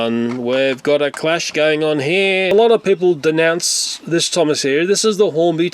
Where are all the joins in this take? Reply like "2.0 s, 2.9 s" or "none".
2.5 s